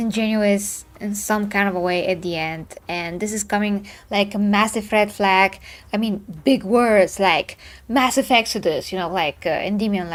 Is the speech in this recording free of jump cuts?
yes; 0 cuts

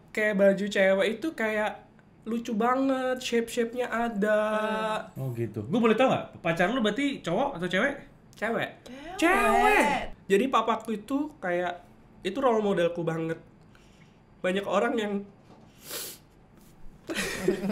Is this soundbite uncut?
no; 2 cuts; at 5.1 s, 10.1 s

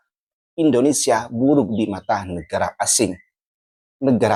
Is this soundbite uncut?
yes; 0 cuts

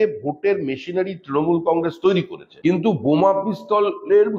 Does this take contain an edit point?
yes; 1 cut; at 2.4 s

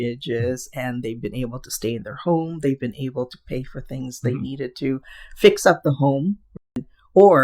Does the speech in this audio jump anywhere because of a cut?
yes; 1 cut; at 6.5 s

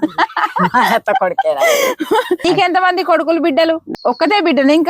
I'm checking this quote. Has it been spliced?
yes; 2 cuts; at 2.4 s, 3.9 s

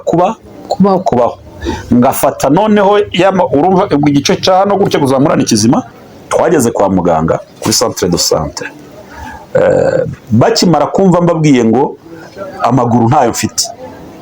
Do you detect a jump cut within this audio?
yes; 1 cut; at 6.0 s

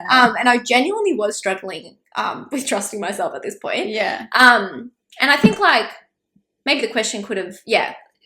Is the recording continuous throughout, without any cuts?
yes; 0 cuts

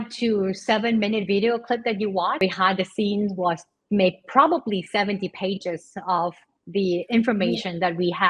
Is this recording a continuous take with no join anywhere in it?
no; 1 cut; at 2.4 s

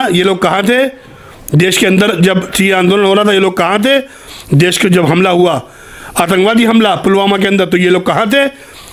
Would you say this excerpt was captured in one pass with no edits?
yes; 0 cuts

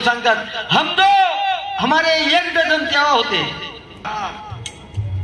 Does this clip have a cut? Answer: yes; 1 cut; at 4.1 s

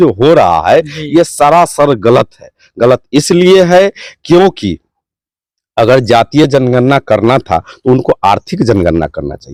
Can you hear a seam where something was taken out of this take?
no; 0 cuts

